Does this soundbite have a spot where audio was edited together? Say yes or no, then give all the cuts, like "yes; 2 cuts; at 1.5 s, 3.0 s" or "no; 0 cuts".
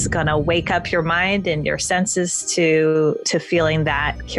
no; 0 cuts